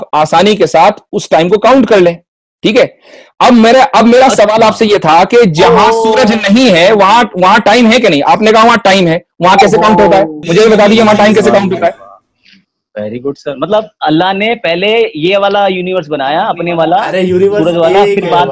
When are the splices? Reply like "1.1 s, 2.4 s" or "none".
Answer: none